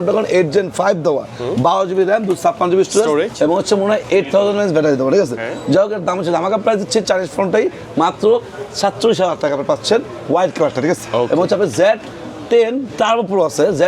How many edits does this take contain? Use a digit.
0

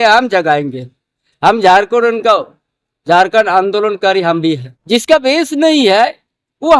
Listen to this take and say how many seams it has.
1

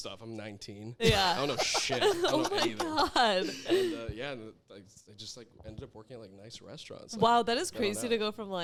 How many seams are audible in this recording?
0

